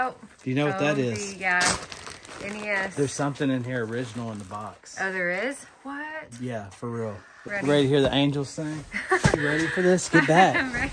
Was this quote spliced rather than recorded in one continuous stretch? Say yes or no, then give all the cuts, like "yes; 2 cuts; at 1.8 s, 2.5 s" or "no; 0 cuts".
yes; 2 cuts; at 7.4 s, 9.3 s